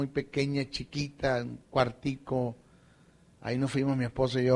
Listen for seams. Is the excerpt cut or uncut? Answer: cut